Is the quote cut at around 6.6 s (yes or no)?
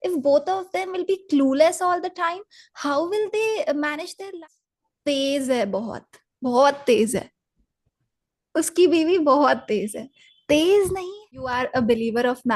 no